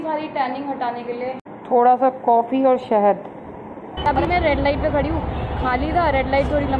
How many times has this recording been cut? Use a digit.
2